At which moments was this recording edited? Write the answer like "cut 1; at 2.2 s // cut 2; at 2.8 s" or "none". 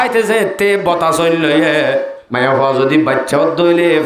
cut 1; at 2.2 s